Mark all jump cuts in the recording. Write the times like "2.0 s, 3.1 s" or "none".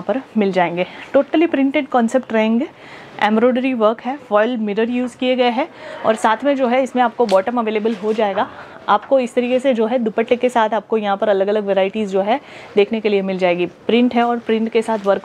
none